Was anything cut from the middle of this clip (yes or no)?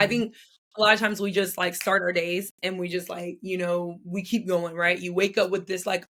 no